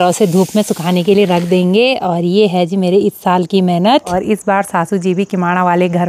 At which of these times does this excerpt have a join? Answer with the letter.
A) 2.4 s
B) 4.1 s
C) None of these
B